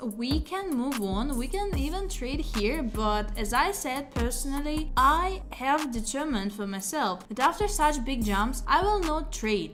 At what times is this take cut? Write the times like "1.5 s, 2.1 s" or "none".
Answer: none